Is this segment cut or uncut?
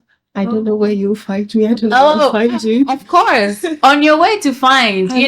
uncut